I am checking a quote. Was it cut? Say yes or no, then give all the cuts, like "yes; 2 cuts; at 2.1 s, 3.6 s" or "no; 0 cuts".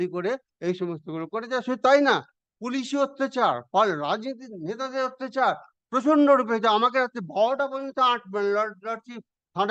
no; 0 cuts